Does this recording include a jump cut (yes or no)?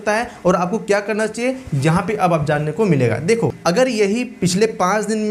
yes